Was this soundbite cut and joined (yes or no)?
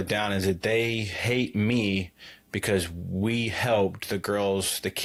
no